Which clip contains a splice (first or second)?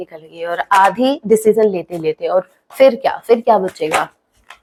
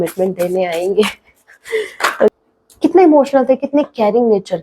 second